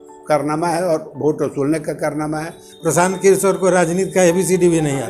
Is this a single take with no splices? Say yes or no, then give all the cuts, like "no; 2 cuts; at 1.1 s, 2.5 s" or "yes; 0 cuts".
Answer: no; 1 cut; at 2.7 s